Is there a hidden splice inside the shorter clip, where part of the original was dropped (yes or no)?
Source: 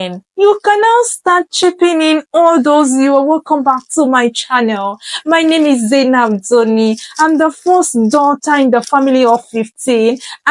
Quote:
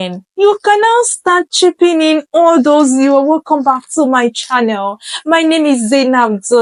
no